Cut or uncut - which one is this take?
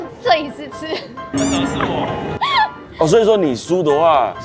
cut